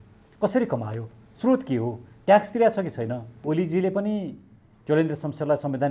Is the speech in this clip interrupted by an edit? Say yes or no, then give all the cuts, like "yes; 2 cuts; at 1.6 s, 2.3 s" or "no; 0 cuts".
yes; 1 cut; at 3.4 s